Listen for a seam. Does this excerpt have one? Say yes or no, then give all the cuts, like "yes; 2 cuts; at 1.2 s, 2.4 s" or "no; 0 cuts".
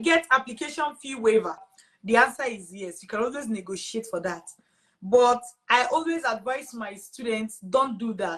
yes; 1 cut; at 1.6 s